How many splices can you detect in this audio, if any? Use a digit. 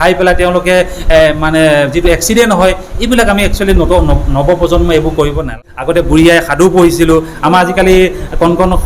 1